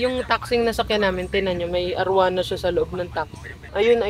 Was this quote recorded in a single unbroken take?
yes; 0 cuts

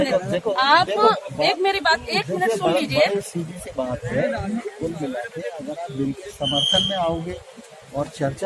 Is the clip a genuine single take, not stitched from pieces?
yes; 0 cuts

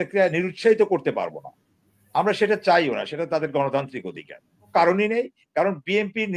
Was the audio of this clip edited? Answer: yes; 1 cut; at 4.7 s

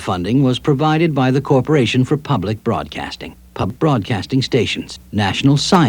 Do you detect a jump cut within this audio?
yes; 2 cuts; at 2.0 s, 3.7 s

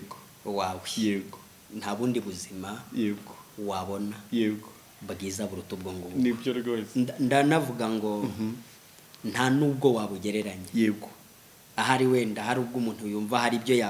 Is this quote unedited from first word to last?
yes; 0 cuts

